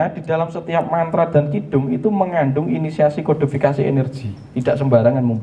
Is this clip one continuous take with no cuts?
yes; 0 cuts

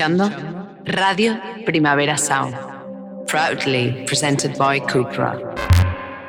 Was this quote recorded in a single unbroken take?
yes; 0 cuts

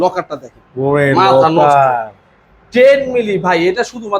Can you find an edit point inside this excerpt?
no; 0 cuts

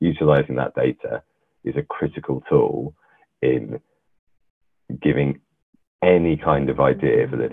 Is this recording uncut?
yes; 0 cuts

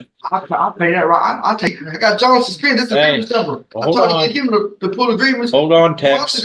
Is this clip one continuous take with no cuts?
no; 1 cut; at 1.7 s

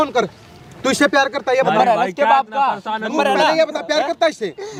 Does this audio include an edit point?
no; 0 cuts

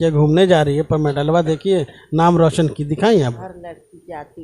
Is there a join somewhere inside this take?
yes; 1 cut; at 3.2 s

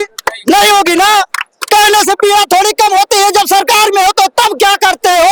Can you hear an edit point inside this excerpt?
no; 0 cuts

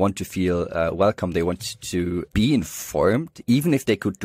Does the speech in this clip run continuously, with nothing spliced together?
no; 1 cut; at 2.2 s

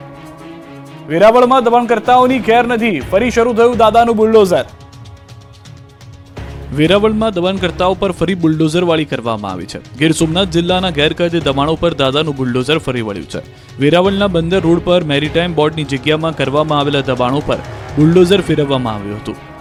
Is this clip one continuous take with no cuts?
yes; 0 cuts

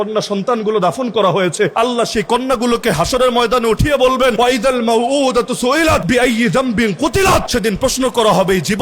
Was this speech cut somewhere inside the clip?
yes; 4 cuts; at 1.7 s, 4.3 s, 6.0 s, 7.5 s

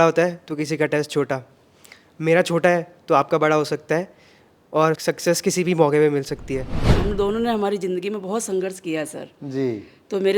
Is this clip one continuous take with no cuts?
no; 1 cut; at 6.9 s

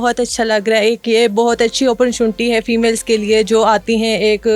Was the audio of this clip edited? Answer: no; 0 cuts

